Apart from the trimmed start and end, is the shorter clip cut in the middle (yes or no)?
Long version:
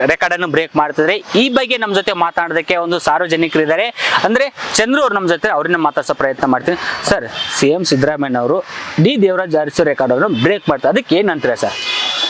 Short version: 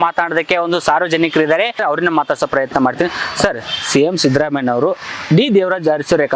yes